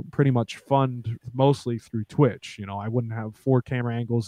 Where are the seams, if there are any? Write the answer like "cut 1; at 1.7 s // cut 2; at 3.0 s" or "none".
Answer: none